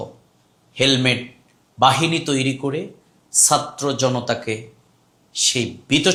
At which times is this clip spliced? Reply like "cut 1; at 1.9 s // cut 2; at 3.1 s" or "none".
none